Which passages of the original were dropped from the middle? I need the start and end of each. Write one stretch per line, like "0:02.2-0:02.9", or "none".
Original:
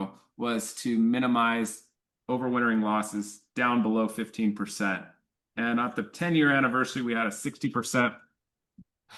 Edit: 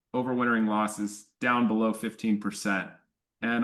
none